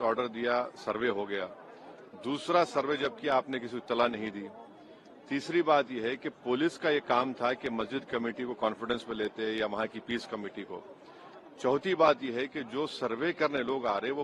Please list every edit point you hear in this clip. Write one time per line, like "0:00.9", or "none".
none

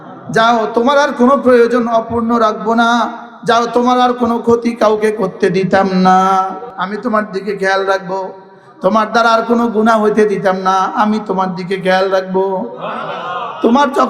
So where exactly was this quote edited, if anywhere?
0:06.7

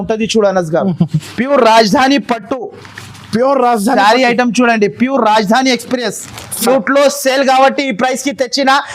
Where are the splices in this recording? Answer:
0:01.2
0:06.6

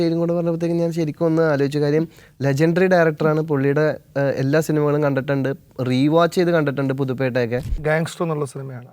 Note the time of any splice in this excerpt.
0:07.8

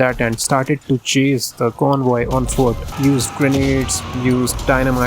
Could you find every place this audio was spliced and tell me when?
0:02.9

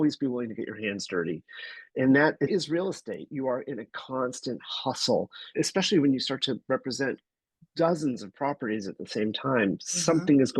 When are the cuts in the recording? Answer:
0:02.5
0:05.5

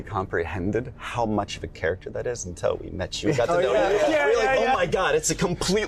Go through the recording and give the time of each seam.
none

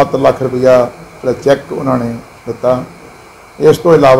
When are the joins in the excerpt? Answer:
none

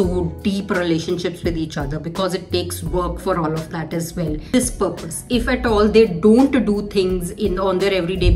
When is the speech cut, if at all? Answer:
0:04.5

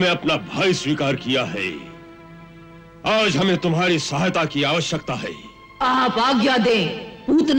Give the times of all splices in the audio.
none

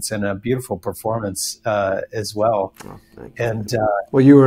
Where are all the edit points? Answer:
0:02.9

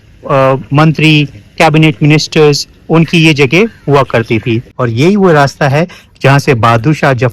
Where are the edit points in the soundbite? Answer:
0:04.5

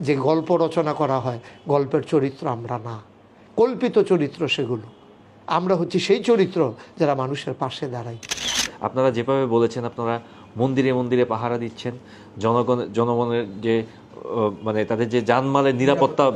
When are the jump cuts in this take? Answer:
0:08.4

